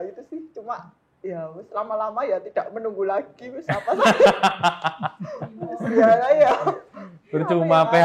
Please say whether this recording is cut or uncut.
uncut